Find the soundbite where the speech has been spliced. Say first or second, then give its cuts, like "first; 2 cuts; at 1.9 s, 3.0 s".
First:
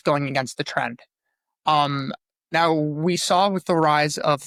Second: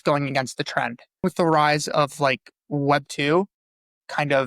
second; 1 cut; at 1.2 s